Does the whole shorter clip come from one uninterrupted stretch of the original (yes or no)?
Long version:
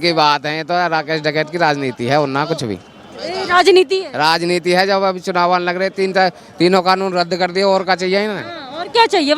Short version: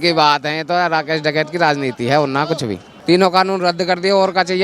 no